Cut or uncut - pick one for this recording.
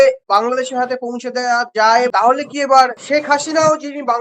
cut